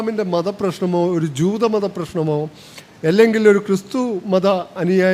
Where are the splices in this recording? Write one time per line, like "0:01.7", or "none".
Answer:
none